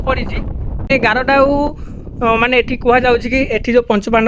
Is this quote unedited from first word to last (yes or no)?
no